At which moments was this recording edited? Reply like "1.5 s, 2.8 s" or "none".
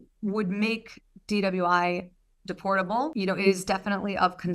none

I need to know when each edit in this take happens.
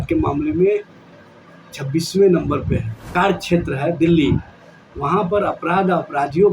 3.0 s

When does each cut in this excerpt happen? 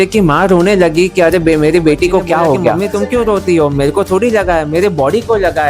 2.8 s

